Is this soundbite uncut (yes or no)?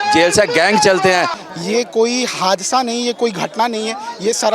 no